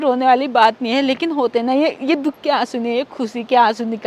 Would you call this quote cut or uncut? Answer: uncut